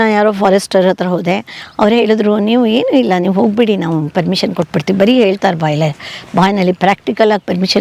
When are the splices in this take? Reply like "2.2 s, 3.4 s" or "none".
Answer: none